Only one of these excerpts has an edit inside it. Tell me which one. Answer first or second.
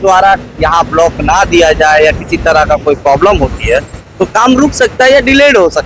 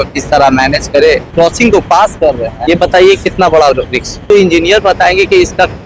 second